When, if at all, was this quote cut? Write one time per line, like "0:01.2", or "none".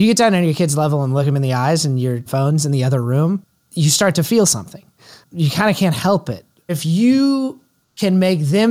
0:01.3
0:02.2
0:03.6
0:06.6